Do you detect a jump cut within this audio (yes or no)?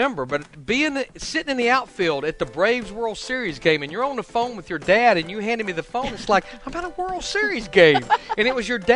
no